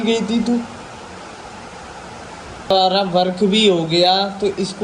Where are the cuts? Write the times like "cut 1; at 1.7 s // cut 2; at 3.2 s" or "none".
cut 1; at 2.7 s